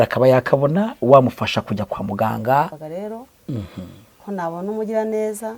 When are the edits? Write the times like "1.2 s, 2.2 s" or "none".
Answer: 2.8 s